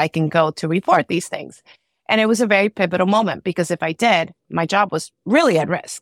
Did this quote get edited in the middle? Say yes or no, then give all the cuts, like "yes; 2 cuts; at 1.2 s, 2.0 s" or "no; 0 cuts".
no; 0 cuts